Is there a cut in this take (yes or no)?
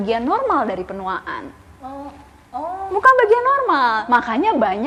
no